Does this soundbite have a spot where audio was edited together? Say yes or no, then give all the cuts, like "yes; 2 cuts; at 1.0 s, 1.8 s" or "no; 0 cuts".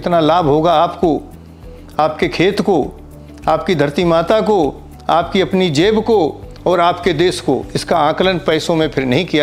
no; 0 cuts